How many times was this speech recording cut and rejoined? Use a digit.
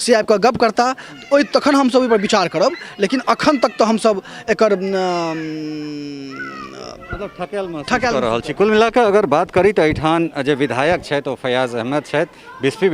0